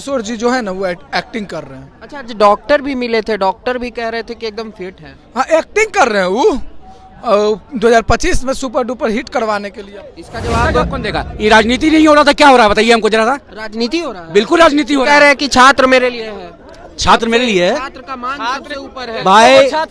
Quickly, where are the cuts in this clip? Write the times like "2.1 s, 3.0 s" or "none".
9.7 s